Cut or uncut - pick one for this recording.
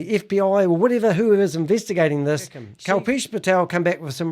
cut